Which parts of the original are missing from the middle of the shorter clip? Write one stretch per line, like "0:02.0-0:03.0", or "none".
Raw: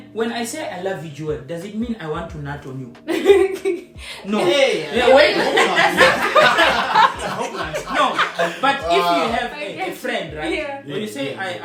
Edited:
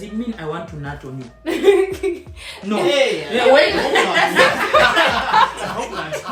none

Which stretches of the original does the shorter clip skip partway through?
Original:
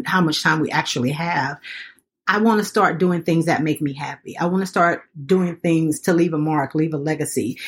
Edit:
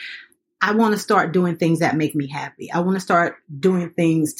none

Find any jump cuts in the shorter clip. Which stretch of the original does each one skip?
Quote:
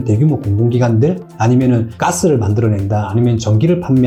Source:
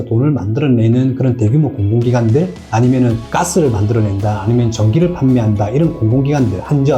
none

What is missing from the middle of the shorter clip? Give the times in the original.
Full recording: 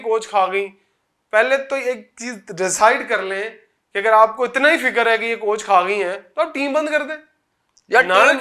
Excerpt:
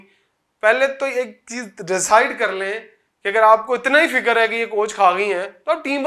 none

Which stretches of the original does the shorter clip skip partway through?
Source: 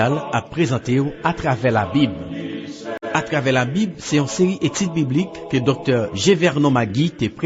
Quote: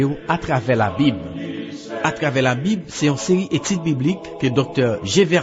0:02.8-0:02.9

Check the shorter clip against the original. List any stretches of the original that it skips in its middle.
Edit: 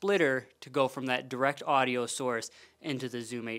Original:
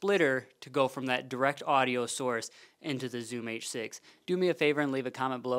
none

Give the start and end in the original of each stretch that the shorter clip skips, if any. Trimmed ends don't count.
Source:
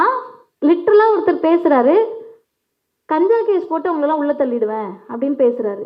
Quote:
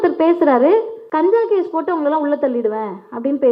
0:02.2-0:03.0

